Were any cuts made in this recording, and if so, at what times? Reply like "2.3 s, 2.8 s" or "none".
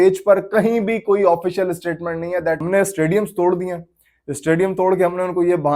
2.6 s